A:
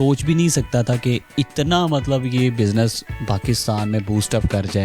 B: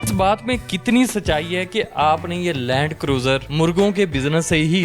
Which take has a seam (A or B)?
B